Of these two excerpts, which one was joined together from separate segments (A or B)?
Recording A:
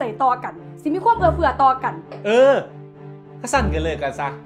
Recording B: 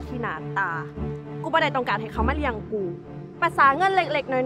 A